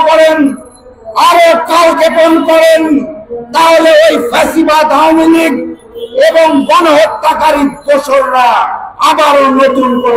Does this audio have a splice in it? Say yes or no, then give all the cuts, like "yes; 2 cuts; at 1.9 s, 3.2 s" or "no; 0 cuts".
no; 0 cuts